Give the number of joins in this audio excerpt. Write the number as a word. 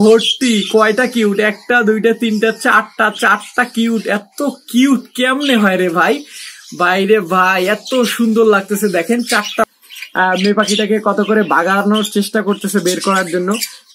one